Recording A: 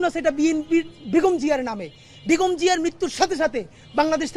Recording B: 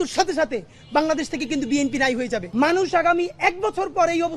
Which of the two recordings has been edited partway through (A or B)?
B